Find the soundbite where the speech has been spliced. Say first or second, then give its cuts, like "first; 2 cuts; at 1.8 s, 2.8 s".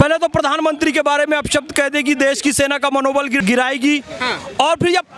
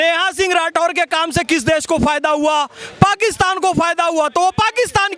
first; 1 cut; at 3.4 s